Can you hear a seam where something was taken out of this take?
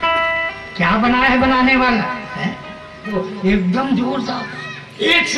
yes; 1 cut; at 3.1 s

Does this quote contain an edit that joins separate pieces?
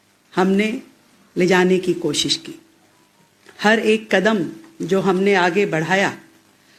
no; 0 cuts

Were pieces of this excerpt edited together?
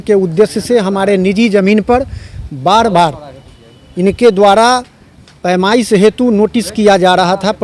no; 0 cuts

